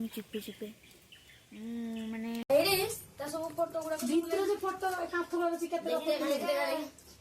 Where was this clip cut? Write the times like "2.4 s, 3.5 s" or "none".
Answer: 2.4 s